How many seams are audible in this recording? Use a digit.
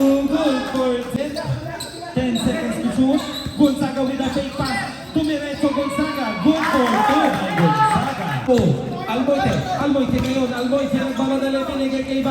2